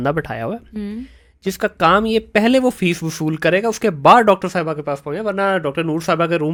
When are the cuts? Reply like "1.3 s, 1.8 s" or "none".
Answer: none